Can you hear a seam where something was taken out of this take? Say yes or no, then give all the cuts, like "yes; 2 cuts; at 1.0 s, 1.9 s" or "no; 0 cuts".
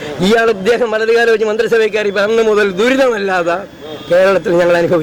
no; 0 cuts